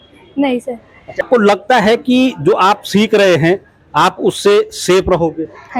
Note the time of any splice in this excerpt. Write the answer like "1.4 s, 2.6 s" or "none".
1.2 s

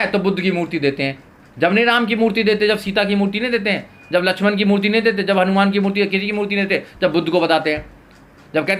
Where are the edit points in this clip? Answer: none

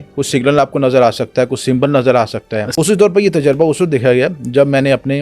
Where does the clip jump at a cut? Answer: 2.7 s

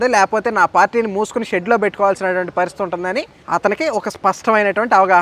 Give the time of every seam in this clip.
none

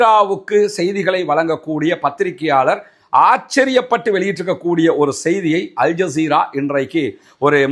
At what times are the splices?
none

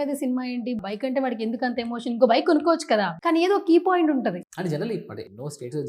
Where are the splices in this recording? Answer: 4.4 s

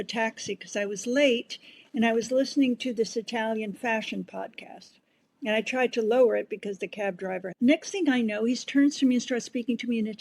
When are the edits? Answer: 7.4 s

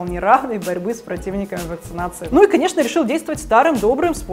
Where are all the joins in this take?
2.2 s

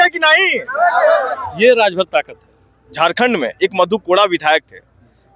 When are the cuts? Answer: 2.9 s

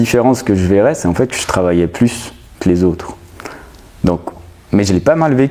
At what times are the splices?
none

